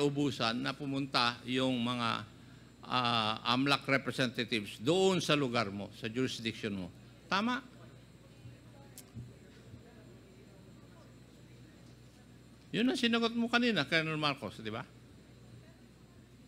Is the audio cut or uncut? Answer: uncut